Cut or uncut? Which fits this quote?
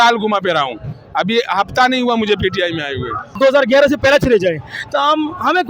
cut